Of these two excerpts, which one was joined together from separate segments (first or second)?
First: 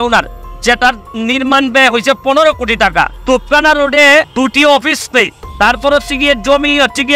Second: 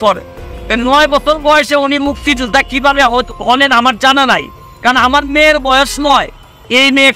first